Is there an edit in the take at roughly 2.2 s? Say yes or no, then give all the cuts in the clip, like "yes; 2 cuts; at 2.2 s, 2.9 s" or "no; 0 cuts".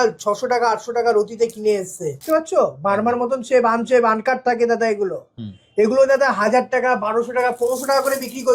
yes; 1 cut; at 2.2 s